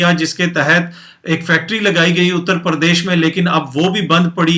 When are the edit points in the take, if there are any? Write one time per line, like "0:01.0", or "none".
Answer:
none